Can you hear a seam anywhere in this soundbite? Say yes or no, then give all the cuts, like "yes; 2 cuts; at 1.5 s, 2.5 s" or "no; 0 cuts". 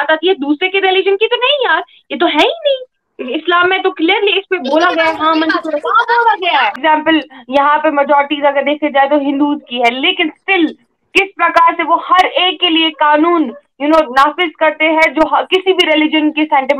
yes; 1 cut; at 6.8 s